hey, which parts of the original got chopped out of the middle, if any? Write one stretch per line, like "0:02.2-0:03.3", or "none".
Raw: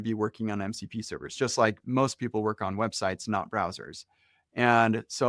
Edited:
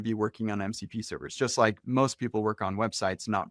none